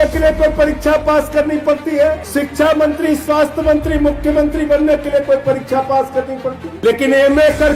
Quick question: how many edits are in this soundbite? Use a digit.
2